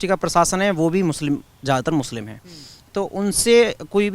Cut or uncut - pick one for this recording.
uncut